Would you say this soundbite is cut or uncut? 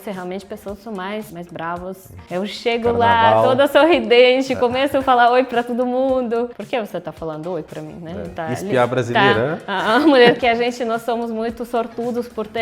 cut